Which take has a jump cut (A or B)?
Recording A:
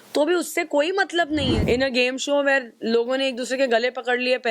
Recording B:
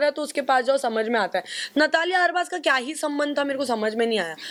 A